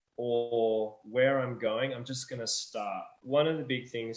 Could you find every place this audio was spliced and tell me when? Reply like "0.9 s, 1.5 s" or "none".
3.1 s